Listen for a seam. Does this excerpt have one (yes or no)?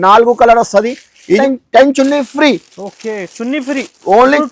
yes